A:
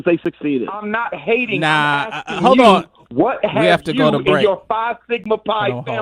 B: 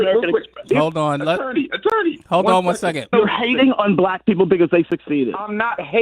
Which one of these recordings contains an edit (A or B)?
B